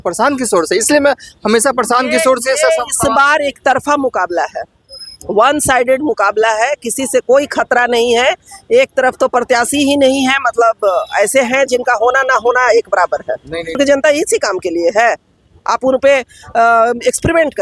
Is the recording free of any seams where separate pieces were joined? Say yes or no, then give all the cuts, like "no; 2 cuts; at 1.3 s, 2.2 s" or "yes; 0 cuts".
no; 1 cut; at 13.8 s